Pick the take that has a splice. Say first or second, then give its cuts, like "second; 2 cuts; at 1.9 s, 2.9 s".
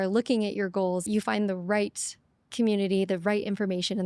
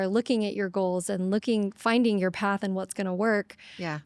first; 1 cut; at 1.0 s